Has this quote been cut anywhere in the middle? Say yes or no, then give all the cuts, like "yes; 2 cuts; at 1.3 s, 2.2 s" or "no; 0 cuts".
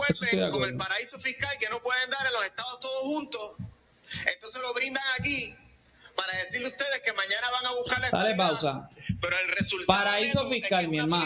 no; 0 cuts